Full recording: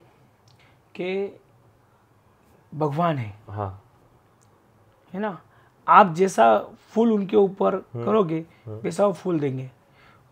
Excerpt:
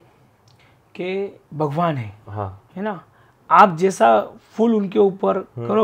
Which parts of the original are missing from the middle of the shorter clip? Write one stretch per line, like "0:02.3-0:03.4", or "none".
0:01.4-0:02.6
0:03.8-0:05.0